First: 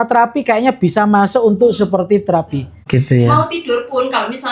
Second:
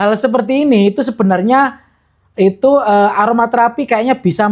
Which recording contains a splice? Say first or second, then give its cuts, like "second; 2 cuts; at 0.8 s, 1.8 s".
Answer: first; 1 cut; at 2.8 s